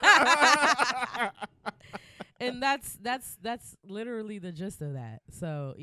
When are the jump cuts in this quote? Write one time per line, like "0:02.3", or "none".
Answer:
none